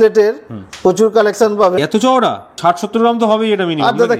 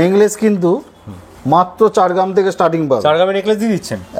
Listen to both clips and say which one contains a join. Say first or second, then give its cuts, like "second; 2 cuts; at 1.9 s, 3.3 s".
first; 1 cut; at 2.3 s